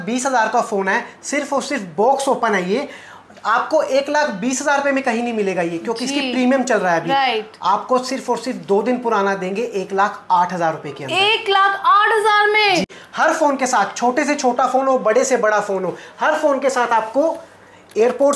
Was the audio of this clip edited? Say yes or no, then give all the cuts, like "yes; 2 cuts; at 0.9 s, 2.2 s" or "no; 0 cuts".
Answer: yes; 1 cut; at 13.0 s